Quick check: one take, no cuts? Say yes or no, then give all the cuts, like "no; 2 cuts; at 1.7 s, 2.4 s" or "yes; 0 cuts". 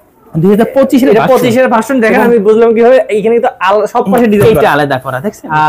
yes; 0 cuts